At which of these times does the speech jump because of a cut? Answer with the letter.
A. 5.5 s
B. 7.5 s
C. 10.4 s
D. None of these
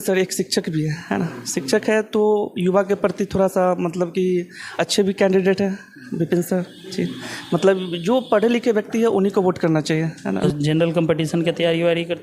C